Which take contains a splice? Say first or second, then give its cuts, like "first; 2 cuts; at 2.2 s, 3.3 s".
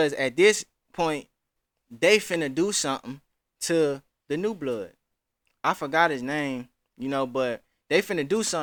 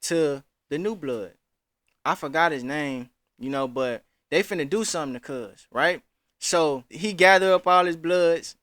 second; 1 cut; at 6.9 s